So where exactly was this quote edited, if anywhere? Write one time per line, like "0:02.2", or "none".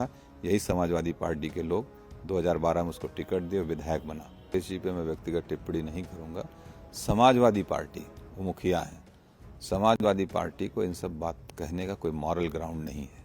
0:04.5